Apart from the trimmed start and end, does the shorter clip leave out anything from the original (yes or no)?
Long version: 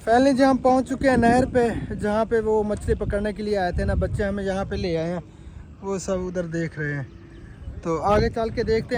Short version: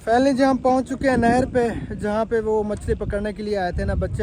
no